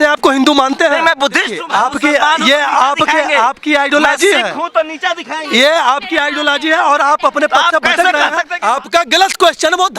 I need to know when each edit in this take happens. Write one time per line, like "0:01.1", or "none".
0:01.6
0:08.5